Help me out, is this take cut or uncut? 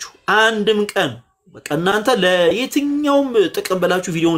uncut